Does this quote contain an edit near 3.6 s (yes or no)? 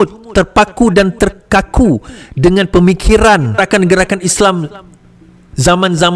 yes